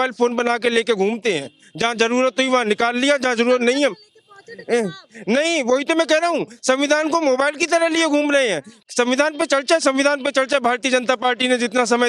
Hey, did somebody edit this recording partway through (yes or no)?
no